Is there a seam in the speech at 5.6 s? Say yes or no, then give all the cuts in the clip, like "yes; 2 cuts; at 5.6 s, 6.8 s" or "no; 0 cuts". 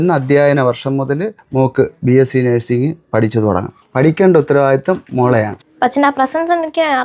yes; 3 cuts; at 1.4 s, 3.8 s, 5.6 s